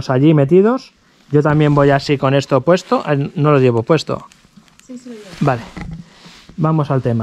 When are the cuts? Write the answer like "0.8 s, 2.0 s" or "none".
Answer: none